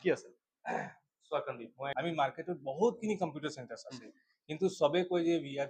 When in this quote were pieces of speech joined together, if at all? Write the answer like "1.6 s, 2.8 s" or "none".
1.9 s